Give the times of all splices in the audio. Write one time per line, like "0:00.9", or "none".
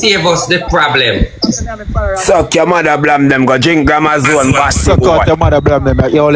none